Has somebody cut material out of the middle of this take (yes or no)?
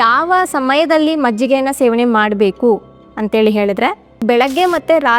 yes